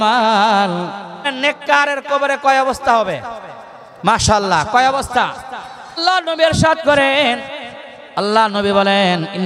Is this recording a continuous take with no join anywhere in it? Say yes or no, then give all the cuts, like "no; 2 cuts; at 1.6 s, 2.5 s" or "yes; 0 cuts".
no; 2 cuts; at 1.3 s, 6.0 s